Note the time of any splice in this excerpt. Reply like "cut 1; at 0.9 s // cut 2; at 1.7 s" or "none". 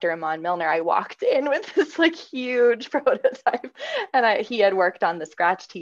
none